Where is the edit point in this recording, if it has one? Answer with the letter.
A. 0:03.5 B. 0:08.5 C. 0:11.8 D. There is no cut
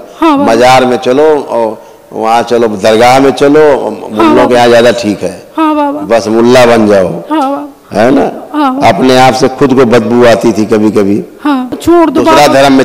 C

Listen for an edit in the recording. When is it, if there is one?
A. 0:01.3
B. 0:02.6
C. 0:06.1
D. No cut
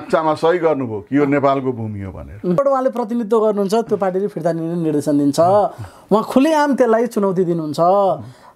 B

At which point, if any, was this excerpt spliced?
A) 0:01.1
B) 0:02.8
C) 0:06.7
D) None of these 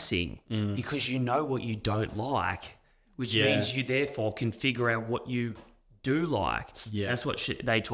D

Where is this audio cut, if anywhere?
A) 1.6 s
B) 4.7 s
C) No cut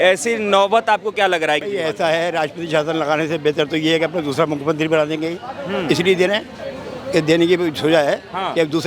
A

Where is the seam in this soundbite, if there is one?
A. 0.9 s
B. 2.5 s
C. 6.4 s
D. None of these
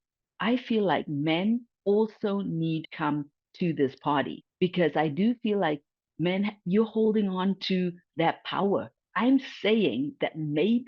B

